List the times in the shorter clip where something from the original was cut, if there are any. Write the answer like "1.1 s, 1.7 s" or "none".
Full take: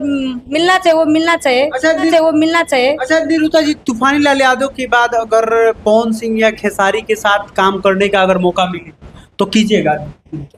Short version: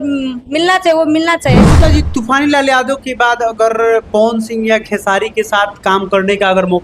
1.7 s